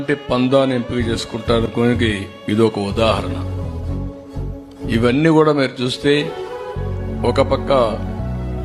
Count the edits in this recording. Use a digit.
2